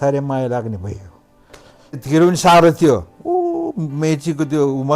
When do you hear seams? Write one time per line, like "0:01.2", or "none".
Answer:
0:02.0

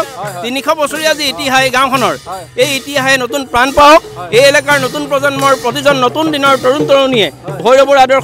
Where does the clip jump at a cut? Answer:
none

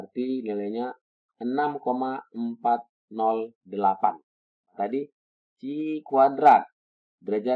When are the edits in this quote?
0:04.7

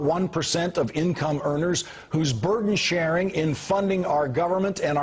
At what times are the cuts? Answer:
0:03.8

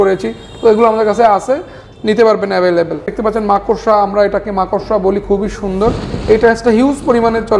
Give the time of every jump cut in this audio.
0:03.1

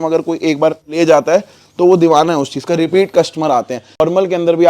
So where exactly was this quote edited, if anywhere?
0:00.9
0:04.0

